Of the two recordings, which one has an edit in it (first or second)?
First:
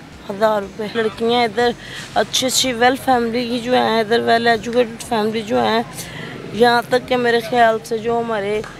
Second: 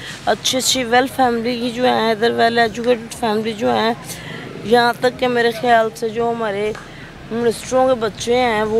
first